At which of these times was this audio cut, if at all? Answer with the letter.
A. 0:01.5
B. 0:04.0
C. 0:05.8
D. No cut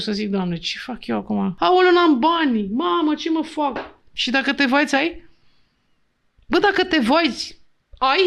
A